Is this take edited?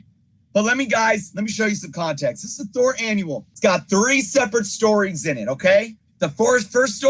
yes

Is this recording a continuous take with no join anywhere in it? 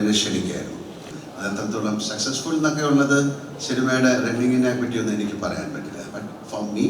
no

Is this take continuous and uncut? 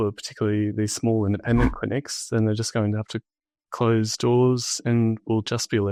yes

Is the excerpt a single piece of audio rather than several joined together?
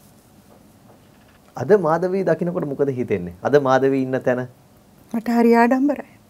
no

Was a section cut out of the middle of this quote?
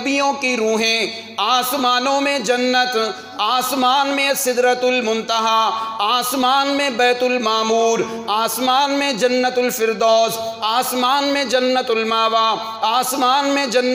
no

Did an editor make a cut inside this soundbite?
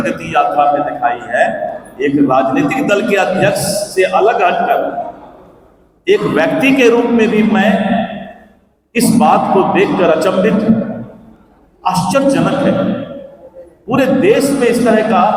no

